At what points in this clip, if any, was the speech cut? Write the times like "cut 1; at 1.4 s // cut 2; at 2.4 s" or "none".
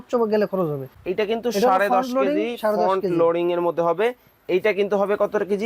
cut 1; at 0.9 s